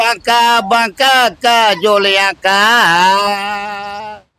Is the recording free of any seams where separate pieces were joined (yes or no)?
yes